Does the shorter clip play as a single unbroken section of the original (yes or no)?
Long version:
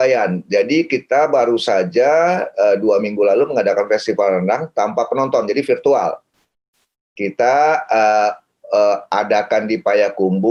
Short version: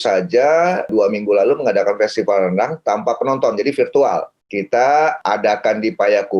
no